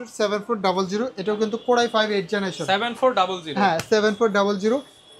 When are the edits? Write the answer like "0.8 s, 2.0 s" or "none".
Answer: none